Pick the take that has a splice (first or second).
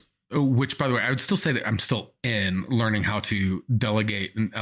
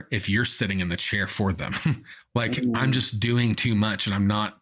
second